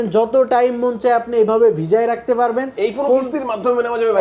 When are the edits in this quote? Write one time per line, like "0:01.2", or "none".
none